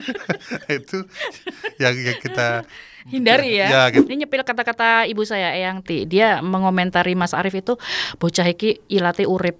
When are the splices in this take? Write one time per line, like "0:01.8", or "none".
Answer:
0:04.0